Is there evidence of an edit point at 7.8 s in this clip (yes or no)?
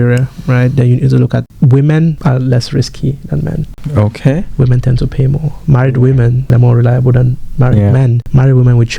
no